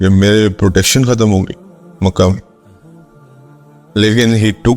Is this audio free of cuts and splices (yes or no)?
no